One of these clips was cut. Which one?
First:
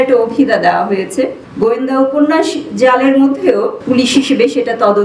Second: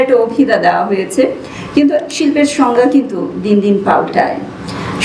first; 2 cuts; at 1.4 s, 3.8 s

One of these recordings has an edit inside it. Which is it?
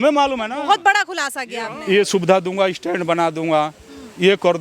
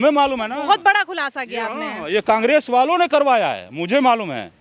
first; 1 cut; at 1.7 s

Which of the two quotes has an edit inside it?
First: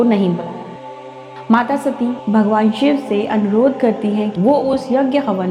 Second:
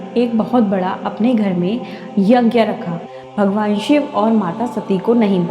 second; 1 cut; at 2.9 s

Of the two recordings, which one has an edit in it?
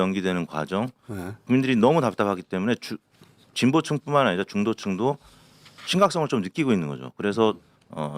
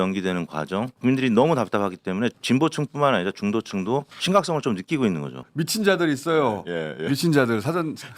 second; 4 cuts; at 0.9 s, 2.4 s, 4.1 s, 5.4 s

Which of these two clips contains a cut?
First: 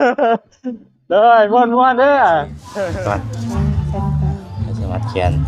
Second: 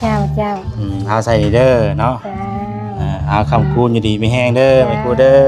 first; 1 cut; at 2.6 s

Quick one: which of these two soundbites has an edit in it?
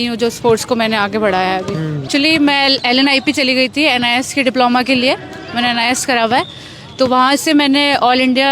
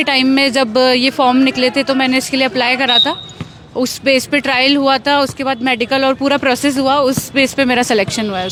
first; 1 cut; at 2.0 s

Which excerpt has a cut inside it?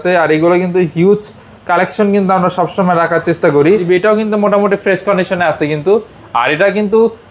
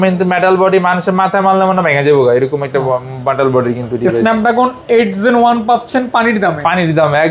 first; 1 cut; at 3.8 s

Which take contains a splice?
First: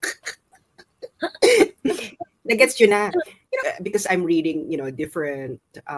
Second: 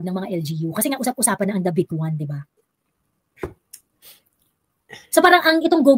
first; 1 cut; at 3.7 s

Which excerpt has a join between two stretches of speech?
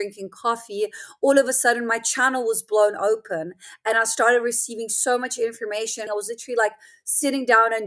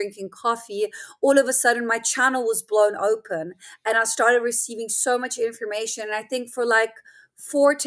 first; 1 cut; at 6.1 s

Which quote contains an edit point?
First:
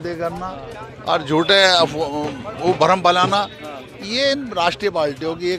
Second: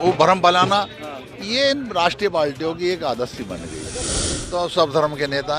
second; 1 cut; at 4.4 s

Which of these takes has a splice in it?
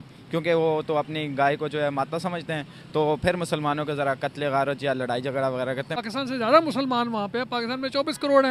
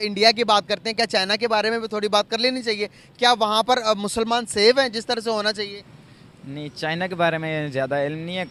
first; 1 cut; at 6.0 s

